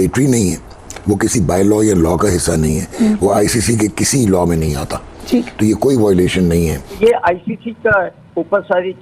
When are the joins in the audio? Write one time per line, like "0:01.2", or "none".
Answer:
0:06.9